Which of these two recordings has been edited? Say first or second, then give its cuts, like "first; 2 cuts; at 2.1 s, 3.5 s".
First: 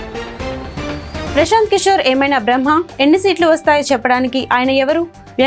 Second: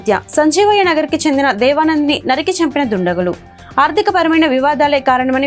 first; 1 cut; at 1.2 s